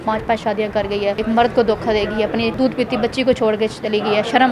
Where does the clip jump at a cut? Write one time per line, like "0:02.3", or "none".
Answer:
0:01.2
0:02.5